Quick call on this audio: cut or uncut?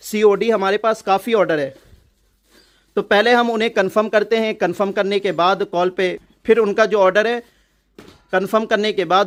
uncut